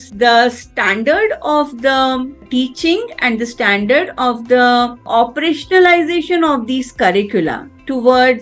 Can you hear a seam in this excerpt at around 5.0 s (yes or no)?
yes